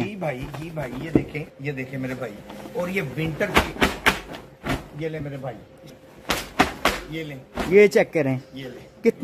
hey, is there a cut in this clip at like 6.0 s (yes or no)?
yes